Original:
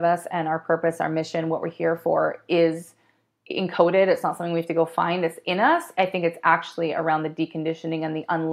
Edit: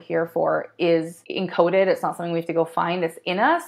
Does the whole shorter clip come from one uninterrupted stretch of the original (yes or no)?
no